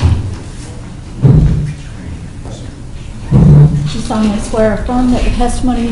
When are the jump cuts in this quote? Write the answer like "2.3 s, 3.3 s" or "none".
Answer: none

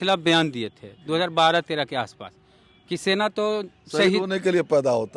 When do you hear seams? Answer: none

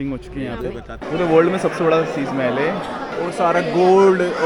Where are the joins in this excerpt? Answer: 0.9 s

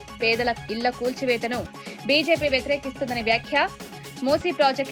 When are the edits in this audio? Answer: none

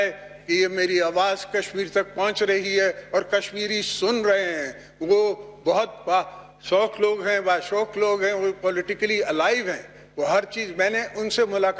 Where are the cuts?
none

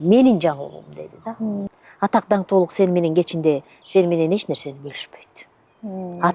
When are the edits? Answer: 1.7 s

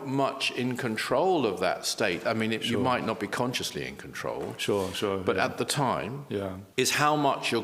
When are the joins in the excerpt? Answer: 6.6 s

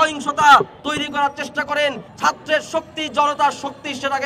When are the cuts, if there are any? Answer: 2.1 s

